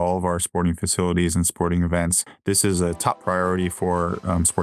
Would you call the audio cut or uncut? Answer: cut